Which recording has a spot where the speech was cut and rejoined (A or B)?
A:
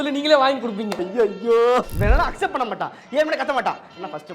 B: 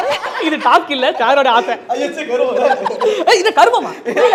A